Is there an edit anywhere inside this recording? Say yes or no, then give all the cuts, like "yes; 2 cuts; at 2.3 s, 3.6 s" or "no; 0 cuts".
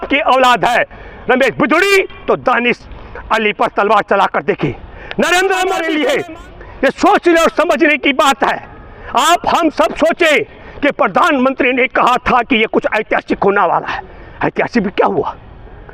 yes; 1 cut; at 5.8 s